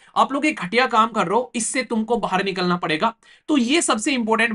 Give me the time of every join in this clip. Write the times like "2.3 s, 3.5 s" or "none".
none